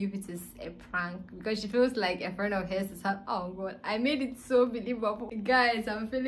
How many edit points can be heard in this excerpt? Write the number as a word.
one